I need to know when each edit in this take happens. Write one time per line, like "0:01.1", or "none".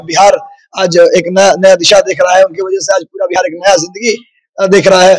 none